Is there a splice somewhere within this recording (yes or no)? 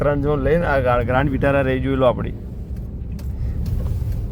no